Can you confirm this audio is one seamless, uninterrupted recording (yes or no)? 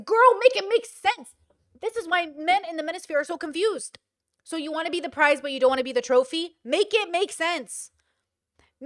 yes